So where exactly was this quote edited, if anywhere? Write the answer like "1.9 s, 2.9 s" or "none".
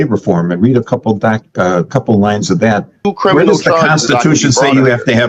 3.0 s